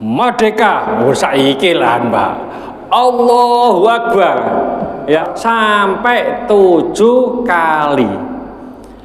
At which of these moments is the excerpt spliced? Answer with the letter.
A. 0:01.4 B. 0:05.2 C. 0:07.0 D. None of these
B